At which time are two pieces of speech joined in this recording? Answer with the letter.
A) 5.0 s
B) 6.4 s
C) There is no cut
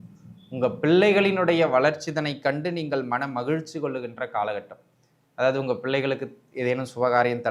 C